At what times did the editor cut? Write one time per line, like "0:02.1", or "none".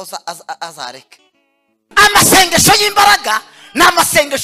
0:01.8